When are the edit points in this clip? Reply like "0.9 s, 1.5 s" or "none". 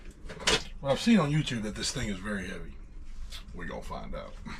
none